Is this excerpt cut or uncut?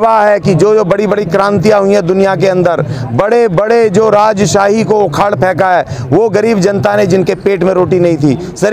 uncut